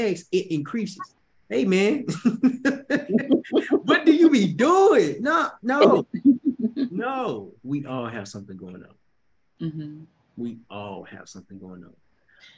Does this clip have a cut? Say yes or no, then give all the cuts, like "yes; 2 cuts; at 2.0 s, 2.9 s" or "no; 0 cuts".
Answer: yes; 1 cut; at 7.5 s